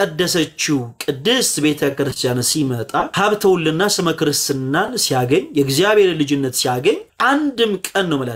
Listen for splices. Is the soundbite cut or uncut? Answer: cut